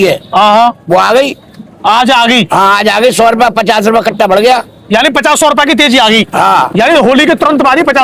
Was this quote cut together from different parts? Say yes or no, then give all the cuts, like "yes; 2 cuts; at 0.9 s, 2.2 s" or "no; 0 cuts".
no; 0 cuts